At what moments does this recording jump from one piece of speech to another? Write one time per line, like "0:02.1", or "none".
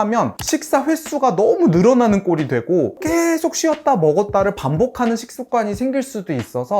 0:03.0